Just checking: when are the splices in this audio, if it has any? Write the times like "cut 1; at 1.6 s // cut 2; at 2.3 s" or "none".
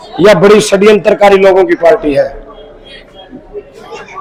none